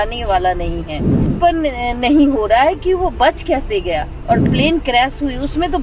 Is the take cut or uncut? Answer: cut